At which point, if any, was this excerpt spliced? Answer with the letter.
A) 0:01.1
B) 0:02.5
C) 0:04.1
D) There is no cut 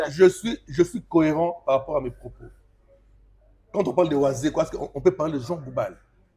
D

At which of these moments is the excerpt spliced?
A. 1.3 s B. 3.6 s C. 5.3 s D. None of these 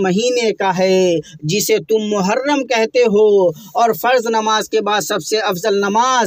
D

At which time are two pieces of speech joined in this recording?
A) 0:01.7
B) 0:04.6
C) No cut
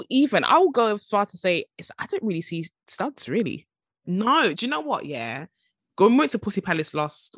B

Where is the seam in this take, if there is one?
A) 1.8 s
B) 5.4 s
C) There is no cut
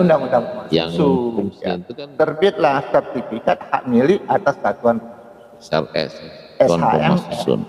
A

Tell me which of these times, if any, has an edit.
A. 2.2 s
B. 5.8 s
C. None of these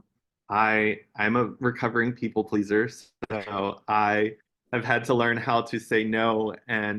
C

